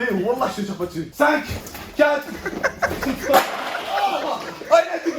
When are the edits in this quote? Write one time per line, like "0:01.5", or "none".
0:01.2

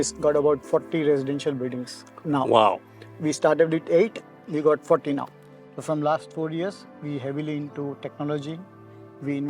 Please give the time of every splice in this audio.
0:05.2

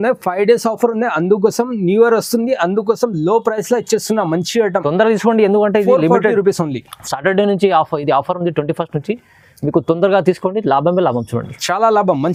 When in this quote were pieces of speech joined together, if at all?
none

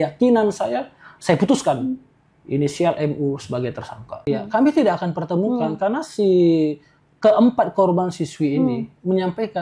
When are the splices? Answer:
0:04.2

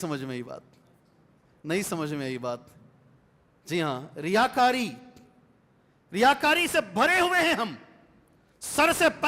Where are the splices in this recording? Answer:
none

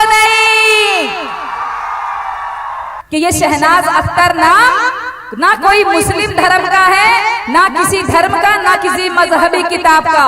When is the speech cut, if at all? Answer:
0:02.9

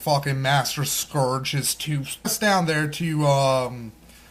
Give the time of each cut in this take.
none

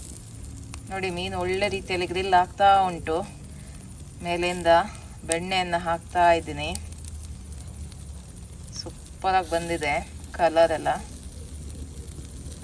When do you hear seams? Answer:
none

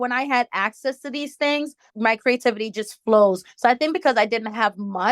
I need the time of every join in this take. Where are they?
0:01.8

